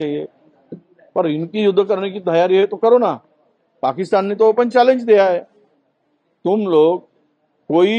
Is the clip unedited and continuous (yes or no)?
yes